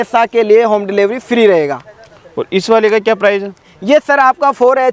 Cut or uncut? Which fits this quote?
uncut